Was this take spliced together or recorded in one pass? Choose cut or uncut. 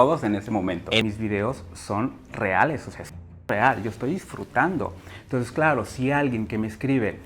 cut